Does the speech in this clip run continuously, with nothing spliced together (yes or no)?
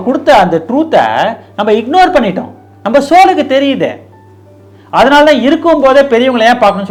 yes